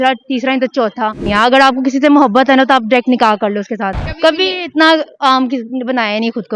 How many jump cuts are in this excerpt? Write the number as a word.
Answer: two